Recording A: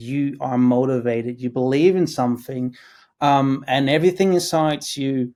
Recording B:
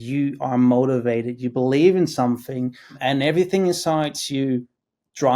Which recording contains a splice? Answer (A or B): B